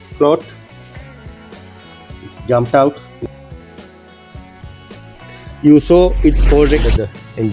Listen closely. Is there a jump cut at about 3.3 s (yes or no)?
yes